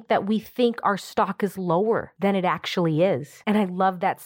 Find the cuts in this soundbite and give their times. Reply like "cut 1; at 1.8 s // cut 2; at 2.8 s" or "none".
cut 1; at 2.1 s // cut 2; at 3.3 s

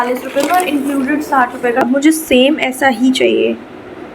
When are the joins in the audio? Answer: cut 1; at 1.8 s

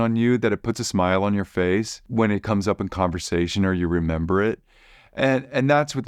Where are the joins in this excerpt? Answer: cut 1; at 2.0 s

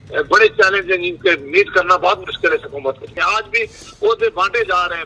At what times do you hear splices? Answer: cut 1; at 3.2 s

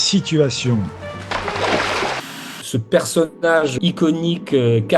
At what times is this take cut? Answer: cut 1; at 2.5 s // cut 2; at 3.8 s

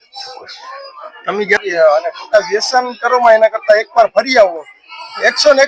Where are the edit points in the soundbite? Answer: cut 1; at 1.6 s

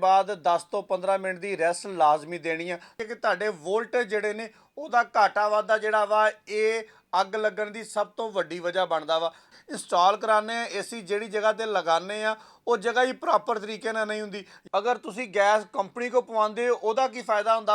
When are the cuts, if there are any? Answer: cut 1; at 3.0 s // cut 2; at 9.5 s // cut 3; at 14.5 s

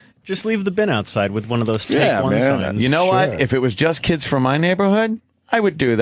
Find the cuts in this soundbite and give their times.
cut 1; at 2.6 s

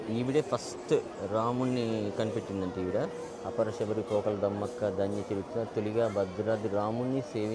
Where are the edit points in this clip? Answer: none

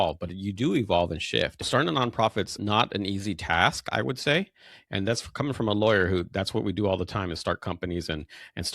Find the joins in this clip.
cut 1; at 1.7 s // cut 2; at 2.6 s

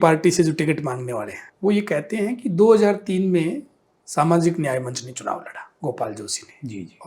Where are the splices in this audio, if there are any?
cut 1; at 1.4 s // cut 2; at 5.7 s

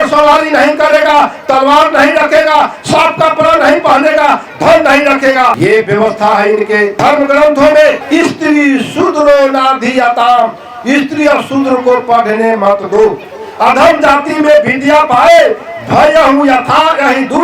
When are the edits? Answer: cut 1; at 5.5 s // cut 2; at 7.0 s // cut 3; at 8.0 s

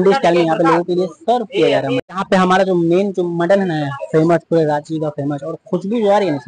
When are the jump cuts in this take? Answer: none

